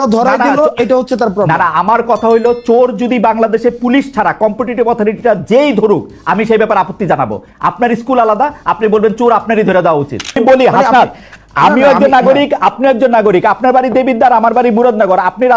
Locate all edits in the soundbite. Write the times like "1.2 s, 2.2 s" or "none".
10.4 s